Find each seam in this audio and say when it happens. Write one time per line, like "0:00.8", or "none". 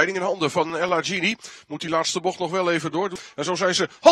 0:03.2

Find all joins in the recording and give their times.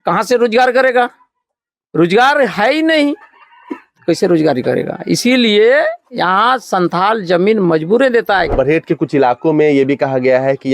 0:08.5

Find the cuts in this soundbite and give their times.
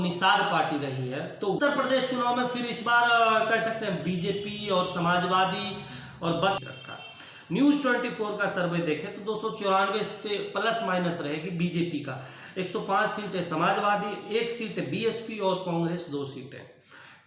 0:01.6
0:06.6

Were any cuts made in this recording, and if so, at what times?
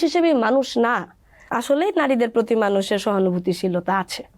0:01.4

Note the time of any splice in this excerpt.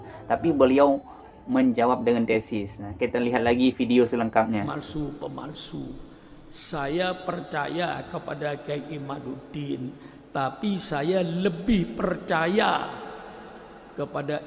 0:04.7

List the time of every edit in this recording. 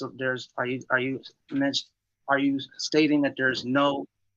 none

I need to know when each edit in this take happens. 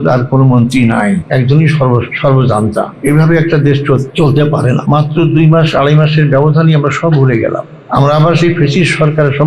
0:01.2
0:02.1
0:02.9
0:04.1
0:04.8
0:07.7

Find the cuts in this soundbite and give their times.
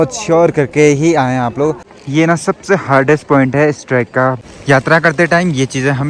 0:01.9
0:04.4

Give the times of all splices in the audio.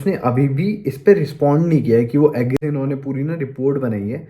0:02.6

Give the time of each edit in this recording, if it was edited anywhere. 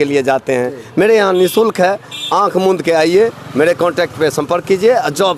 none

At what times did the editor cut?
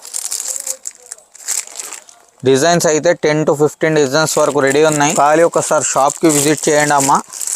0:05.1

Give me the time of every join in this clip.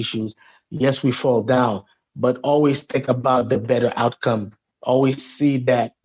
0:04.7

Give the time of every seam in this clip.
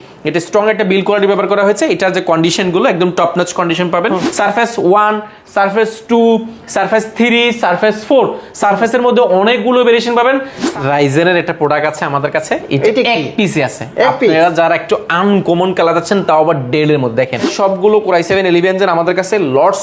0:04.3
0:10.6
0:17.5

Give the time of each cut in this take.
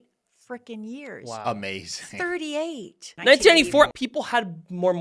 0:03.1
0:03.9

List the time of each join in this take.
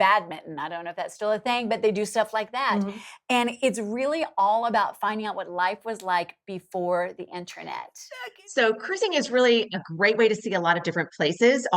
0:08.0

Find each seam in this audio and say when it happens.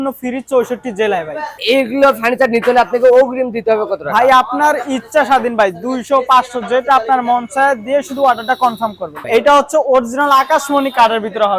0:01.5
0:09.1

